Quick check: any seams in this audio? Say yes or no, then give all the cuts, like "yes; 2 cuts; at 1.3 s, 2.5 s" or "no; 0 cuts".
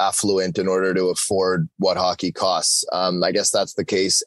no; 0 cuts